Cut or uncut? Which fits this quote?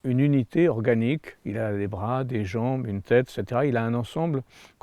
uncut